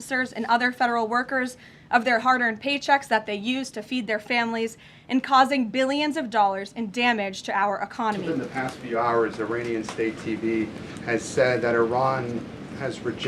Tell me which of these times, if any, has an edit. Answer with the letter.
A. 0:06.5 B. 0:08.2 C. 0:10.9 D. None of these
B